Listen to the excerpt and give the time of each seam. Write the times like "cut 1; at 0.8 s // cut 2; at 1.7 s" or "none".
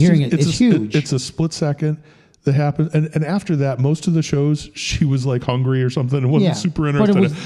none